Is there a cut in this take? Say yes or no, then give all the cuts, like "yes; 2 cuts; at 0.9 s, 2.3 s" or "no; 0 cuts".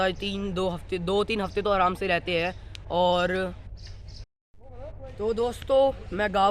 yes; 1 cut; at 4.2 s